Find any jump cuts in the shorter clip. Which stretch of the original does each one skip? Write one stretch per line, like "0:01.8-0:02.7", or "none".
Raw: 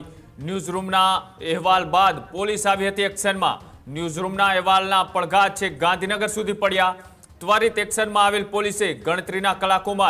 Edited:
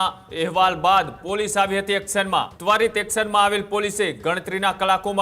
0:03.6-0:07.3